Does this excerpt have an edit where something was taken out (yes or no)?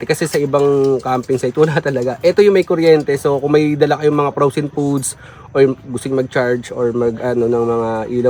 no